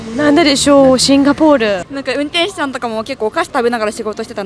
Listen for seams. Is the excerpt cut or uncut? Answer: cut